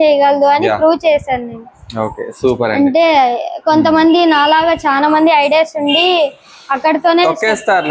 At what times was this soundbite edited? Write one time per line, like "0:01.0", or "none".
none